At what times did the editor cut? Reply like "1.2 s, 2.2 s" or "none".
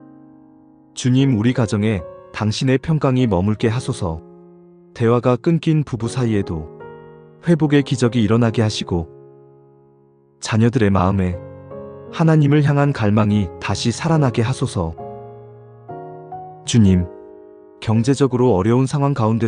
0.9 s